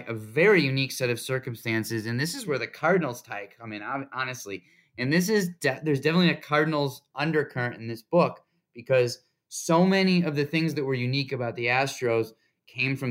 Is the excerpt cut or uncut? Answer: uncut